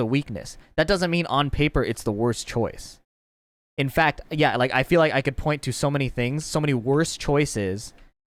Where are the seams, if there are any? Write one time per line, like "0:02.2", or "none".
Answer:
none

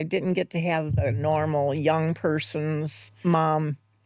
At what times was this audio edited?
0:03.0

